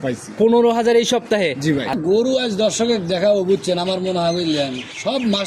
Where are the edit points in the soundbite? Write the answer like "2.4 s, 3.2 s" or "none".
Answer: 2.0 s